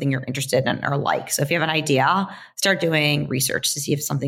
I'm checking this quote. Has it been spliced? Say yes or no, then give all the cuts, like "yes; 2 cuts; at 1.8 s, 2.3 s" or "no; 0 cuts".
no; 0 cuts